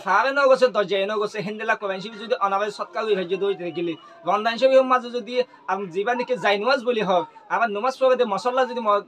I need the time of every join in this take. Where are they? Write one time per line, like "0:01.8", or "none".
none